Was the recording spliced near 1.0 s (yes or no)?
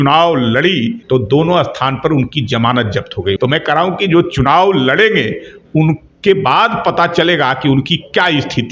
yes